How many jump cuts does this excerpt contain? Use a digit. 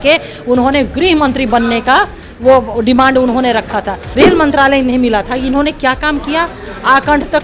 1